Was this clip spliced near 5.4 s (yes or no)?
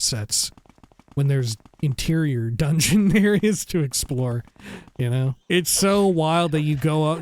yes